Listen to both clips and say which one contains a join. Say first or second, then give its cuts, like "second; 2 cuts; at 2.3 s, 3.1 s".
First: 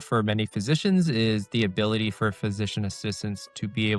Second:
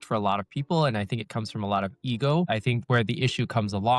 second; 1 cut; at 2.8 s